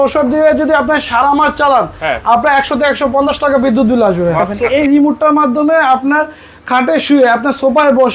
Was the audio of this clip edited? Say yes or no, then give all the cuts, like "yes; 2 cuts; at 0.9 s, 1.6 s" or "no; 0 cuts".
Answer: yes; 1 cut; at 4.6 s